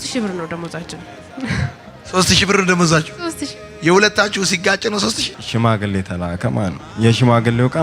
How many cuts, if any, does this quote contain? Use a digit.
2